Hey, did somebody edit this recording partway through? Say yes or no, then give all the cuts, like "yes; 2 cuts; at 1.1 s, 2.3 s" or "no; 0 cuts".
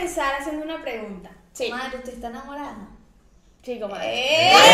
no; 0 cuts